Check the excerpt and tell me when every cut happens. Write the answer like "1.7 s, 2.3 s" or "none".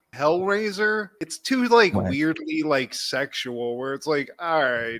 none